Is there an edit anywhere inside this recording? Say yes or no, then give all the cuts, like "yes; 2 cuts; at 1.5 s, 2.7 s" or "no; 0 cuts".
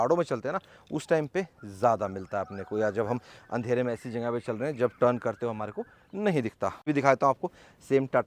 no; 0 cuts